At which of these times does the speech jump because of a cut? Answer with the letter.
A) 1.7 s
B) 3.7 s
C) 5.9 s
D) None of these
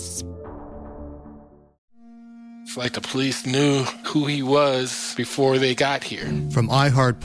A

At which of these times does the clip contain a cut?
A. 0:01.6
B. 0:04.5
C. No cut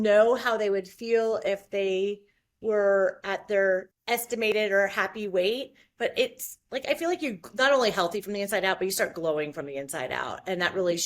B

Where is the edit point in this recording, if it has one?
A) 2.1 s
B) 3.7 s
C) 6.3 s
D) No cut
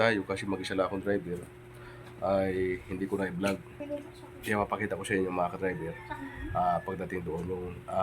B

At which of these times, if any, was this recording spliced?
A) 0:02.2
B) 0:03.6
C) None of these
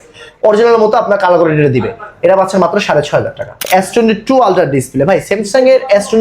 B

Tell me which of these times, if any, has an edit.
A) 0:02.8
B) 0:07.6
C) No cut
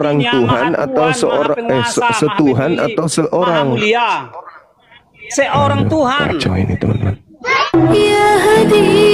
B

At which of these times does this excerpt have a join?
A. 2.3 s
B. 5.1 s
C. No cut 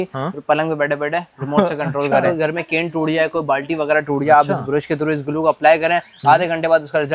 A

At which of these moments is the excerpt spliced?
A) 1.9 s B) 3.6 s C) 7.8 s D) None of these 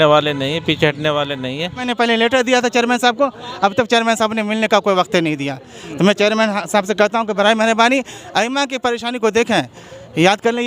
A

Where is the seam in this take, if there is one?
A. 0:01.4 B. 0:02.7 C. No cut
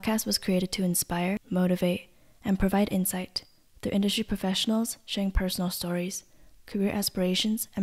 A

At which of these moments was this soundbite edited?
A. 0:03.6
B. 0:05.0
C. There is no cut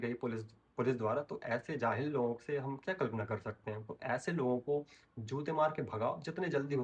C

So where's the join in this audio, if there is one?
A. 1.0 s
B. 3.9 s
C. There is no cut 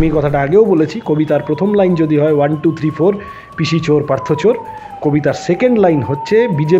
C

